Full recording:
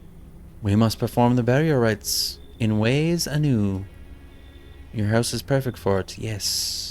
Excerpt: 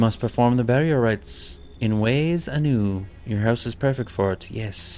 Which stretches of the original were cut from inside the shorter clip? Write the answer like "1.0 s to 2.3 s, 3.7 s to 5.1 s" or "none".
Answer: 3.9 s to 4.8 s